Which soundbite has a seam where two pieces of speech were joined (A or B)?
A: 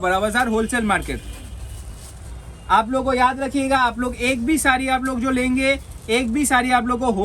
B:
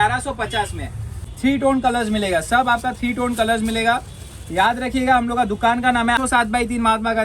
B